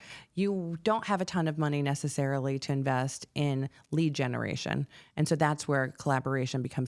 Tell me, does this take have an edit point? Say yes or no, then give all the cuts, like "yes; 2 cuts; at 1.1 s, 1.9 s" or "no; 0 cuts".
no; 0 cuts